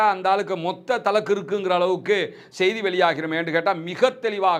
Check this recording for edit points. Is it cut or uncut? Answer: uncut